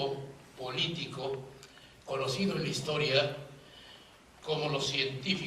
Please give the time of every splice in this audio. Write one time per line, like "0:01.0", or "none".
0:01.1